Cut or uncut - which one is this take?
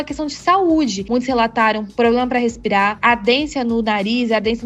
cut